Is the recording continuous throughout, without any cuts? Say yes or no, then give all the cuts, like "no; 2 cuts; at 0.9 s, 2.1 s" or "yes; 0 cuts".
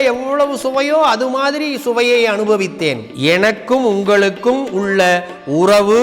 no; 1 cut; at 3.1 s